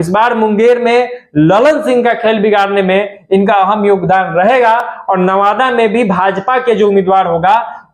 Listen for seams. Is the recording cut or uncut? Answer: uncut